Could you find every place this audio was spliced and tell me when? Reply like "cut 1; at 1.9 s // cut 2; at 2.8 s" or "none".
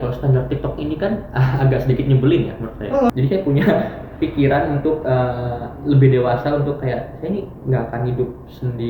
cut 1; at 3.1 s